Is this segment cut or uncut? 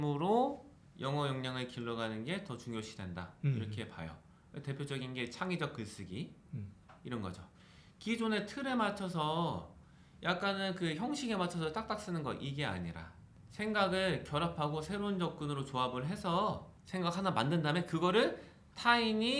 uncut